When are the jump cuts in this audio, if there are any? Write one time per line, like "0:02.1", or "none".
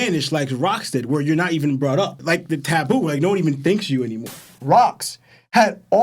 0:04.5